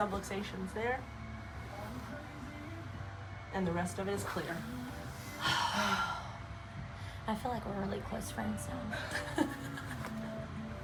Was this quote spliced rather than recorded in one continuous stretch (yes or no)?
no